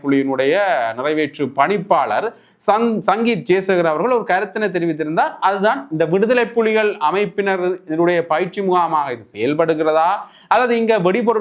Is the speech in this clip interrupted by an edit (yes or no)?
no